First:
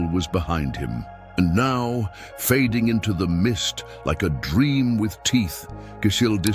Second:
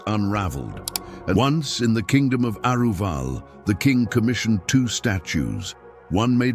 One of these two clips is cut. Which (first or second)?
second